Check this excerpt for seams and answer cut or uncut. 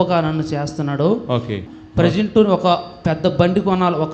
cut